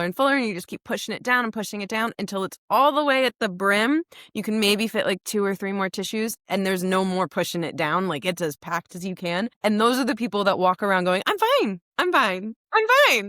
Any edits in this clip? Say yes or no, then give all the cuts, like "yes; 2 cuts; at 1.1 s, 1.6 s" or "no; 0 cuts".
yes; 1 cut; at 9.5 s